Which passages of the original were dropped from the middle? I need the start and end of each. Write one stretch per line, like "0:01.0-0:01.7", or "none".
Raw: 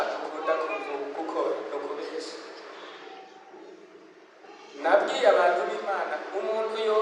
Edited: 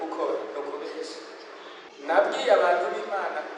0:03.0-0:04.6